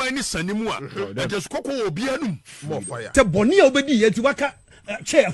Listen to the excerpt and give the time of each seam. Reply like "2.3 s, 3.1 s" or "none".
3.1 s